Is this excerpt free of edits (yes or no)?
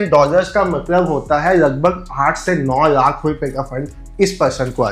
yes